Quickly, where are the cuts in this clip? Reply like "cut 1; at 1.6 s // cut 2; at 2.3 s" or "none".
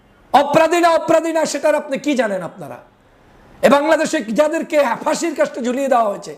none